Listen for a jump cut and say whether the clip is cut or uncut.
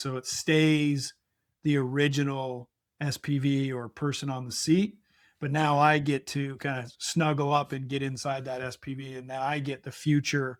uncut